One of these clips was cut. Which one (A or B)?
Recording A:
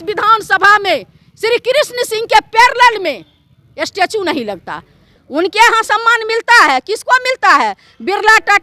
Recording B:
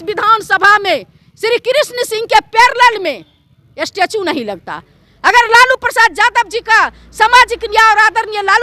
A